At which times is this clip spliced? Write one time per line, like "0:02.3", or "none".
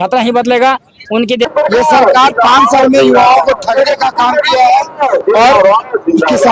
0:01.5